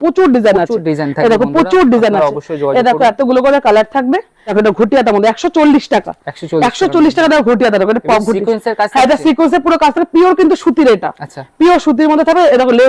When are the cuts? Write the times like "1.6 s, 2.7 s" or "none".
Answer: 4.4 s